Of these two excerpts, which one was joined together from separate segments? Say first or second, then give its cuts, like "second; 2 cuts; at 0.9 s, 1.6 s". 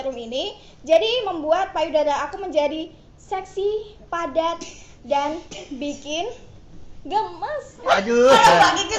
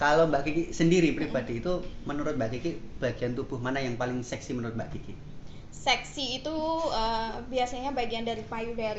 first; 1 cut; at 8.0 s